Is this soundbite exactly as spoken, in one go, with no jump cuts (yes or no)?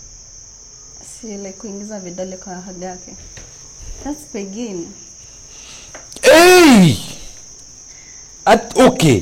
yes